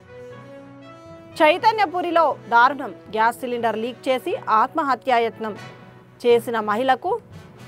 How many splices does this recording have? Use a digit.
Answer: 0